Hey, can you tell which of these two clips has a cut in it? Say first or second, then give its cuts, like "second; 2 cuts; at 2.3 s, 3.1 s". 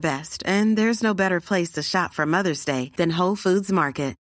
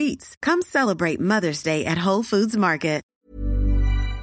second; 1 cut; at 3.1 s